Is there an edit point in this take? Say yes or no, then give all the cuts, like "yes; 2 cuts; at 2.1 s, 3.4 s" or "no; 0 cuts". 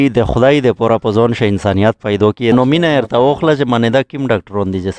yes; 1 cut; at 2.5 s